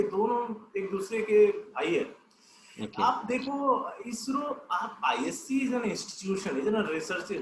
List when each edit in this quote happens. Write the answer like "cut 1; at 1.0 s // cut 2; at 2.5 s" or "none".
none